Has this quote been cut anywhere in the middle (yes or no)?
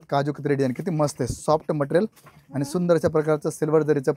no